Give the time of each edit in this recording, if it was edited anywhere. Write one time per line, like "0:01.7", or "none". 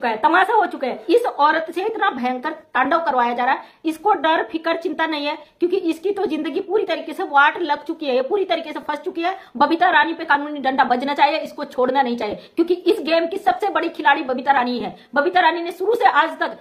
0:01.0
0:09.4